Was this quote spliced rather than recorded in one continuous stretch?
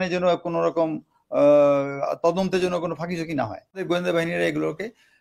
yes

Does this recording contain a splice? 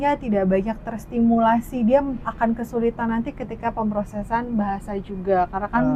no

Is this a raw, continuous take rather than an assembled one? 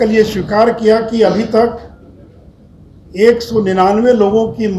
yes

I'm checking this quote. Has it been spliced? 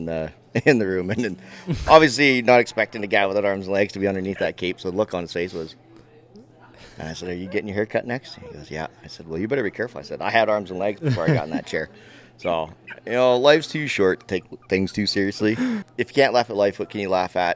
yes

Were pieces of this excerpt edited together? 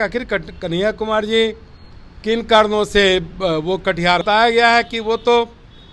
yes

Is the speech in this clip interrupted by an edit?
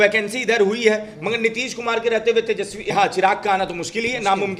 no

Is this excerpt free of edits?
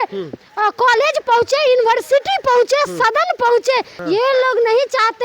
no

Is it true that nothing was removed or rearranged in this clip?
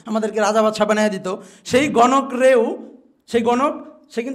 yes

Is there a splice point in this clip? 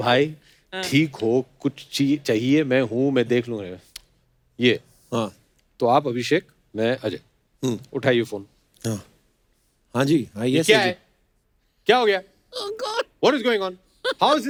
no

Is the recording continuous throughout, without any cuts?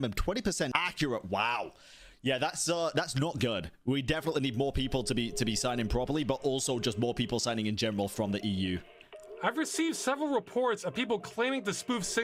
yes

